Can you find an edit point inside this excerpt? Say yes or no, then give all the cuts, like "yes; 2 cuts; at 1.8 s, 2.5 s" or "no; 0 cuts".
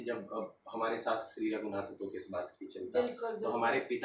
no; 0 cuts